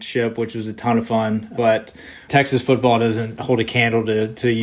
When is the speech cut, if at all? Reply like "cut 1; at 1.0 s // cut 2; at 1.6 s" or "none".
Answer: cut 1; at 2.2 s // cut 2; at 3.4 s